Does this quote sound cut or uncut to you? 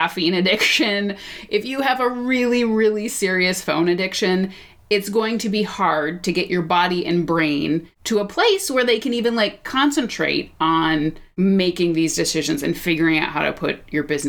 cut